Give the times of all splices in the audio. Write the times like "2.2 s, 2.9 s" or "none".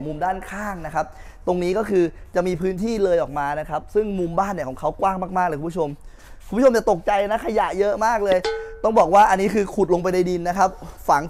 none